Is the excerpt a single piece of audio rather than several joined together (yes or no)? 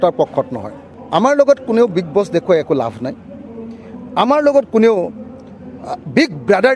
no